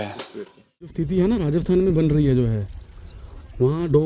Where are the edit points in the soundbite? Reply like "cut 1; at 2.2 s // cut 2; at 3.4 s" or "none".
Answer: cut 1; at 0.9 s